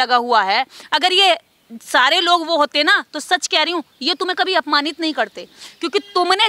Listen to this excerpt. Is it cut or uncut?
uncut